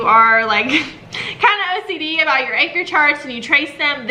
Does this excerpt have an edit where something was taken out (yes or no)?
no